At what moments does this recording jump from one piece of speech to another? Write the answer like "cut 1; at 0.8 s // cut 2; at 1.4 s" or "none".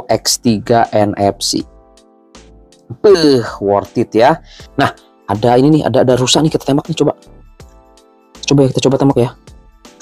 cut 1; at 4.6 s